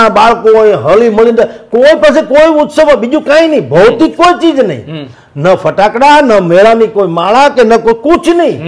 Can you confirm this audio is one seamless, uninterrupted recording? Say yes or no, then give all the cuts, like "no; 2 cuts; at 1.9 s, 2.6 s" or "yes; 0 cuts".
yes; 0 cuts